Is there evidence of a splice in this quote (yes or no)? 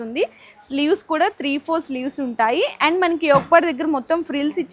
no